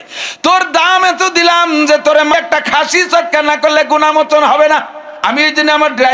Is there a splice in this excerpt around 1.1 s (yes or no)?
no